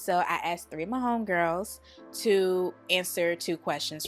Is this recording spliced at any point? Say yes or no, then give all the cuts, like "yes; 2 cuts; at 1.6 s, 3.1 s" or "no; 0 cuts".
no; 0 cuts